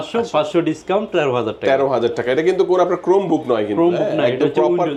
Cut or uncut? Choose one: uncut